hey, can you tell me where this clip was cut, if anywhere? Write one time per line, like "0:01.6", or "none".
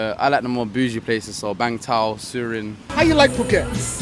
0:02.8